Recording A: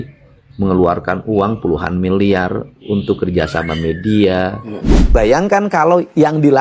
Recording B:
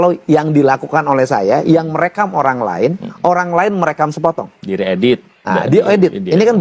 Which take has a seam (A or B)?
A